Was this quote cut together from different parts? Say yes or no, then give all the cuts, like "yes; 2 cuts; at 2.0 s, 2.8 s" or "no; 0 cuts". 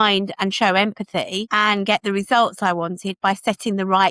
no; 0 cuts